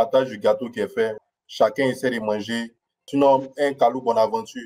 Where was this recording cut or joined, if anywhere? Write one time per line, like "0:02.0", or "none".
0:01.2
0:03.0

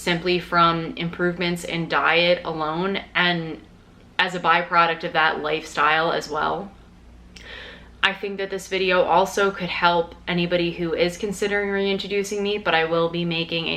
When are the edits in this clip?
none

